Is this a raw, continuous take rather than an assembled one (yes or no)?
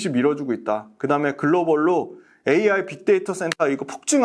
yes